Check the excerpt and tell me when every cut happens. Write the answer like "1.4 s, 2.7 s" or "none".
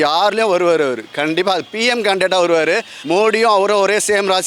2.9 s